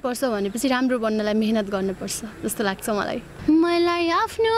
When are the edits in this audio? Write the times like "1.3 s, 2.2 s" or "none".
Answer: 3.4 s